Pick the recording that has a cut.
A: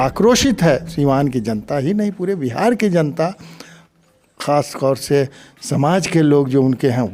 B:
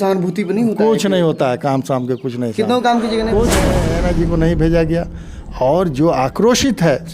B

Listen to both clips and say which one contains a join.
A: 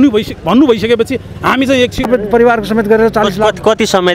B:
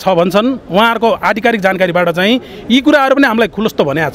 A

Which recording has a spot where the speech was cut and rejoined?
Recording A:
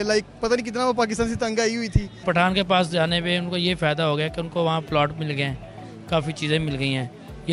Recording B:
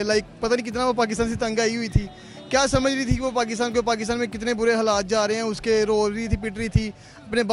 A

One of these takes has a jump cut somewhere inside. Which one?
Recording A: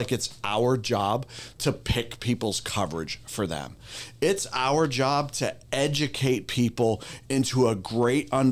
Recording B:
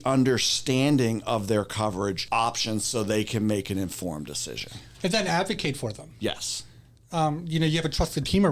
B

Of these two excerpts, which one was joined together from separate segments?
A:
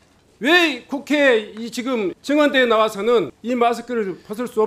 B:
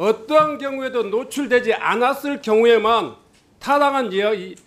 A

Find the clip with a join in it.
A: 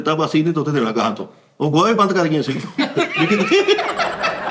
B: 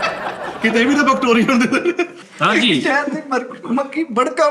B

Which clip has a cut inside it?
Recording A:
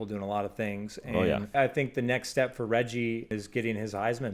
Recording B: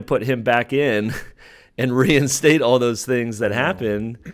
A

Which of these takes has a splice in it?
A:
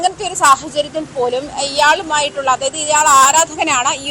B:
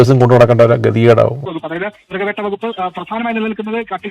B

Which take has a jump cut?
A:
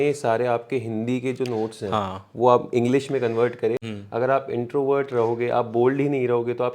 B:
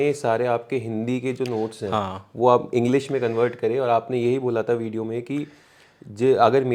A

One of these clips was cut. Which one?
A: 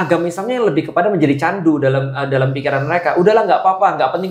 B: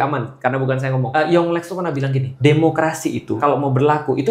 B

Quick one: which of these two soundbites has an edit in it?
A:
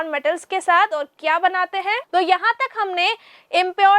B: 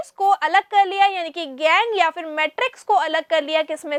A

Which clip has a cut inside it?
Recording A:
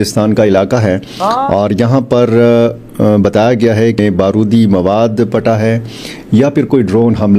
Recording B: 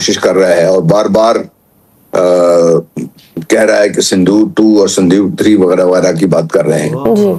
A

